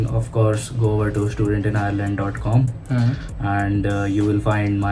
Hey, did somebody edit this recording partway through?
no; 0 cuts

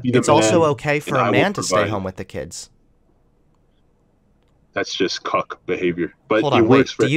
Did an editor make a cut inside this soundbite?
no; 0 cuts

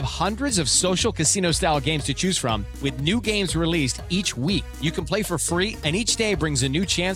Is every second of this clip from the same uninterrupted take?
yes; 0 cuts

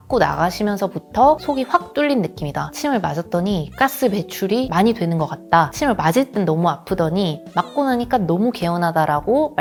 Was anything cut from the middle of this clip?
no; 0 cuts

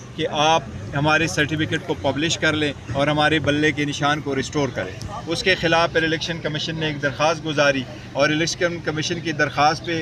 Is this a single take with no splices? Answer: yes; 0 cuts

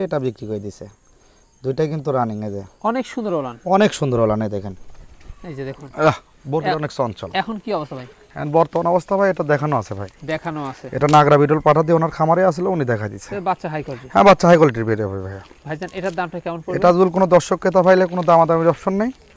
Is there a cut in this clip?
no; 0 cuts

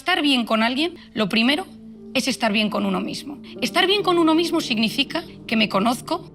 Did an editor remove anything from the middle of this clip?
no; 0 cuts

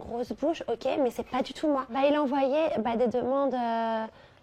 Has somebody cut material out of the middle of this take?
yes; 1 cut; at 1.9 s

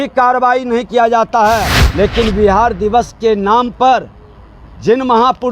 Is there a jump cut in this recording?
yes; 1 cut; at 1.8 s

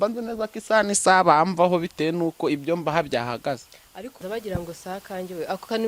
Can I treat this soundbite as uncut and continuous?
no; 1 cut; at 4.2 s

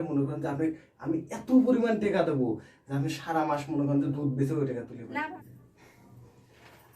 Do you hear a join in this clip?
yes; 1 cut; at 5.3 s

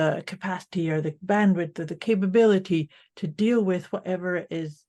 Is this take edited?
no; 0 cuts

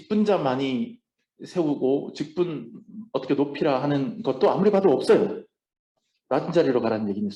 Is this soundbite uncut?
yes; 0 cuts

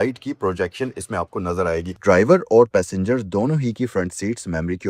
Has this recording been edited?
yes; 1 cut; at 1.9 s

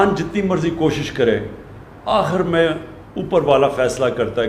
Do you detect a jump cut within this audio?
no; 0 cuts

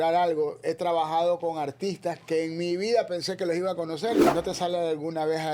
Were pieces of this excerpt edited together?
yes; 1 cut; at 4.2 s

